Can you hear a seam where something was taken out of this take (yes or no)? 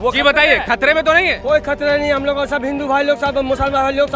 no